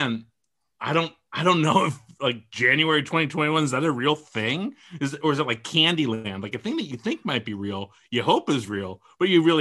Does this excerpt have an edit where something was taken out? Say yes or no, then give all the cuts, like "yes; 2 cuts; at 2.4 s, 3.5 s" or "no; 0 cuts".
no; 0 cuts